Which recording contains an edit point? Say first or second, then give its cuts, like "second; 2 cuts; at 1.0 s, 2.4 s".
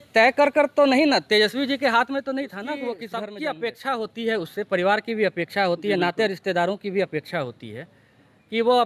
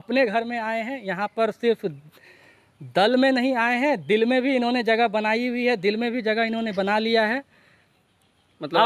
first; 1 cut; at 3.1 s